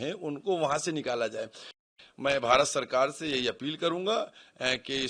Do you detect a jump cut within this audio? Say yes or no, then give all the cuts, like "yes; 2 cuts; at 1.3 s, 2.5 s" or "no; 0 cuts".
yes; 1 cut; at 1.9 s